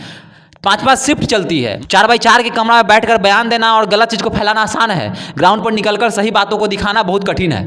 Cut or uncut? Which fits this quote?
cut